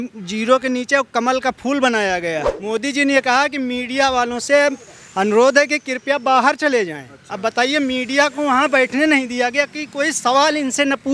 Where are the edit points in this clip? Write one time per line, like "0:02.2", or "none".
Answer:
0:02.5